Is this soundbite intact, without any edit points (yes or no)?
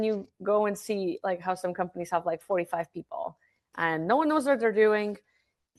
yes